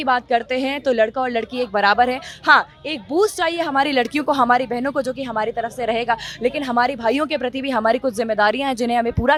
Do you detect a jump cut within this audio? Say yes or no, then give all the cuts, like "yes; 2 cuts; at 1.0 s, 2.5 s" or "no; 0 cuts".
no; 0 cuts